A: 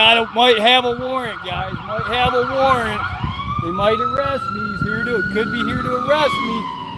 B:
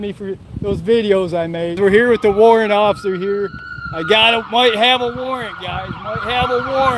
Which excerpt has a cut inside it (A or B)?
B